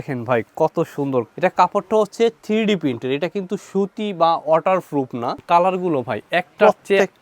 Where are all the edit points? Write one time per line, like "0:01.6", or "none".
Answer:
0:01.3
0:05.4